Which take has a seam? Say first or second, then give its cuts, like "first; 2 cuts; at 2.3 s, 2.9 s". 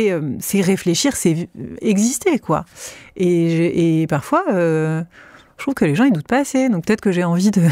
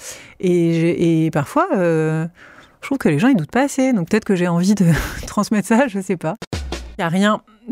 second; 1 cut; at 6.8 s